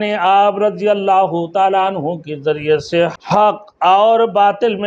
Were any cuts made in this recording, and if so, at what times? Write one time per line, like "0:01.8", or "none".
0:03.1